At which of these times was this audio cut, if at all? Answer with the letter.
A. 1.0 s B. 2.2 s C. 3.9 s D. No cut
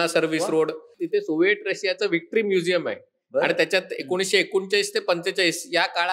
A